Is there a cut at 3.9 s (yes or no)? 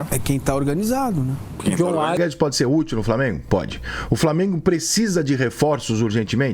no